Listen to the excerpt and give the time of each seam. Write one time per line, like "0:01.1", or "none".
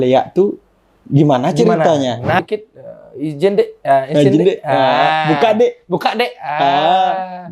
0:02.4

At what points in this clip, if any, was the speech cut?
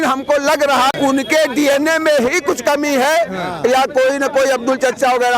0:00.9

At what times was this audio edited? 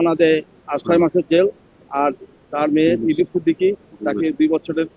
none

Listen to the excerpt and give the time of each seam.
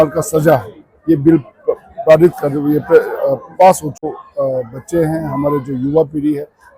0:04.1

